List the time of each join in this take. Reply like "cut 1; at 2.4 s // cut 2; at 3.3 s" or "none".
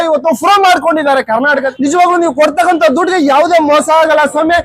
cut 1; at 1.7 s